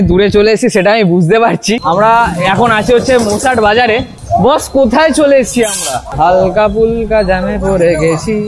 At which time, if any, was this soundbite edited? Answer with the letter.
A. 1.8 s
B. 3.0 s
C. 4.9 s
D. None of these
A